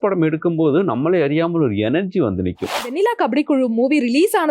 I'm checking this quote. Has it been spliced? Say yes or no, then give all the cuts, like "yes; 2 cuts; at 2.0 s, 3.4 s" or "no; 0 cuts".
yes; 1 cut; at 2.9 s